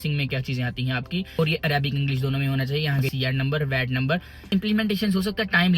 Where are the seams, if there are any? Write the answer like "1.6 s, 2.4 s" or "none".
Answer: 1.4 s, 3.1 s, 4.5 s